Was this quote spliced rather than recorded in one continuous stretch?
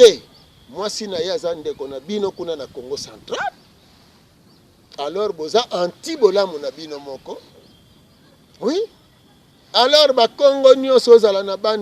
no; 0 cuts

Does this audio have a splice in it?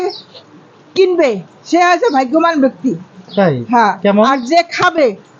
no; 0 cuts

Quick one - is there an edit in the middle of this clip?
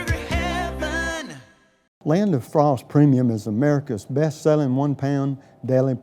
yes; 1 cut; at 1.9 s

